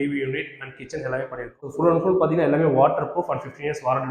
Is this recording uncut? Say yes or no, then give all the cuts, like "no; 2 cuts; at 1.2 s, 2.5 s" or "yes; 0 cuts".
no; 1 cut; at 1.7 s